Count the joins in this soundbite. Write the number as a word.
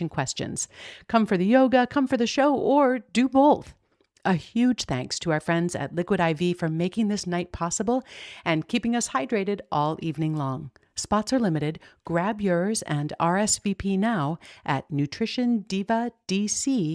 zero